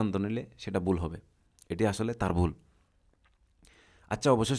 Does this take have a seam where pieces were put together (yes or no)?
no